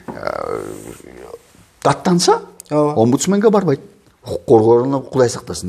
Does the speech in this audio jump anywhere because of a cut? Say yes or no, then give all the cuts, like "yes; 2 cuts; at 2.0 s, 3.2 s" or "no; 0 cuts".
no; 0 cuts